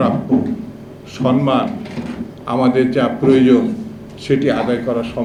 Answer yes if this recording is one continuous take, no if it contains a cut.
yes